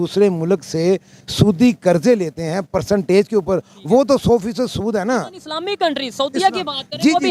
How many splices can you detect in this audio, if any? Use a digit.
0